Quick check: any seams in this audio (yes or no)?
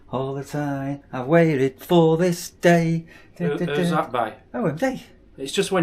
no